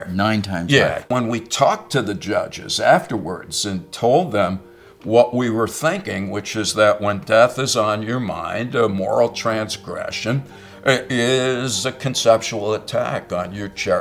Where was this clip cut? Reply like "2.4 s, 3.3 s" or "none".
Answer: 1.1 s